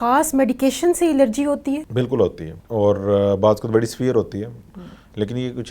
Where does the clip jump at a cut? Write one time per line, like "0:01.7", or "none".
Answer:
0:01.9
0:02.5